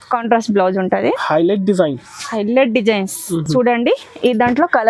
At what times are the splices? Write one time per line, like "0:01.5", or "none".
none